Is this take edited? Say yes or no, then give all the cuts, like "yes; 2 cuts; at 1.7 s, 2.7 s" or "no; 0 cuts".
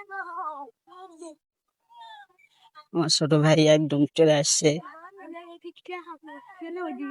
no; 0 cuts